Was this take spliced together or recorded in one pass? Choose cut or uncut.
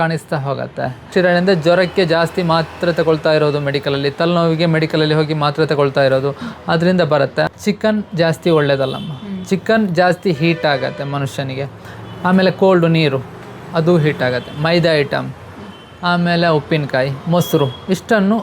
cut